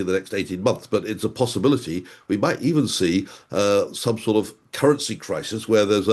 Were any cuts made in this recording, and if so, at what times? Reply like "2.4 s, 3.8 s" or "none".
none